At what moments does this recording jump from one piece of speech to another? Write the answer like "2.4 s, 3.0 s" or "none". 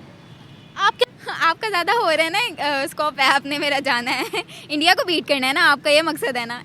1.0 s